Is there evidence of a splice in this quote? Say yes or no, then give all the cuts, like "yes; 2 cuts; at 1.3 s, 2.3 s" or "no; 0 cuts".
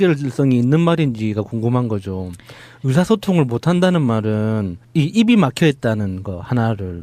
yes; 1 cut; at 1.4 s